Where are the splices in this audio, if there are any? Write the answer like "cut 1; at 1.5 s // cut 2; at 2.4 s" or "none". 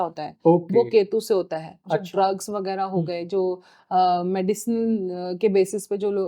none